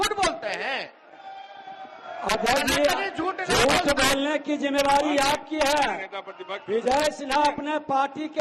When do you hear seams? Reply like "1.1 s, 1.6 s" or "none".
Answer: none